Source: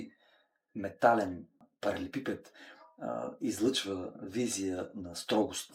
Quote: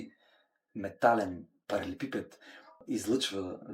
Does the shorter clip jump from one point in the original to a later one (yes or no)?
yes